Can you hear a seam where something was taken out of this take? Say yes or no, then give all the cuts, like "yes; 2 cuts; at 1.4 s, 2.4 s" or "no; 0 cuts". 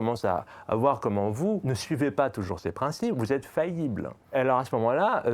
yes; 2 cuts; at 1.7 s, 4.3 s